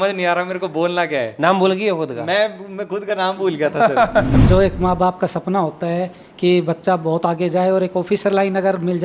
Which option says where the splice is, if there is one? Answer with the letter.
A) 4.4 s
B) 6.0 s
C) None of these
A